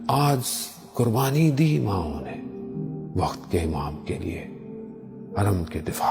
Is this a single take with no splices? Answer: yes; 0 cuts

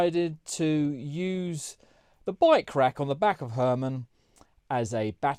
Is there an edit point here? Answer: no; 0 cuts

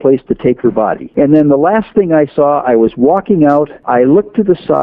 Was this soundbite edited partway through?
yes; 2 cuts; at 1.0 s, 3.8 s

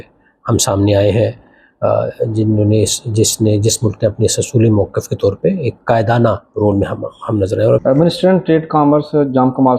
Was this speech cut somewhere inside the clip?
yes; 1 cut; at 7.8 s

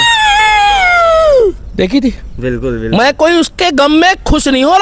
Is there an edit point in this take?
no; 0 cuts

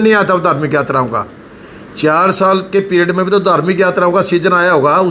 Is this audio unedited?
yes; 0 cuts

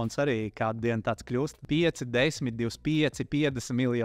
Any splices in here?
yes; 1 cut; at 1.6 s

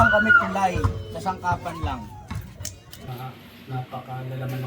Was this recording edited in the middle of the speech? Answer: yes; 1 cut; at 3.1 s

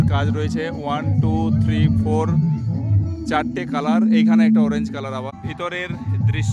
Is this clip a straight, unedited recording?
no; 1 cut; at 5.3 s

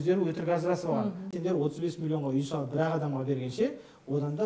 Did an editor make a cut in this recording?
yes; 1 cut; at 1.3 s

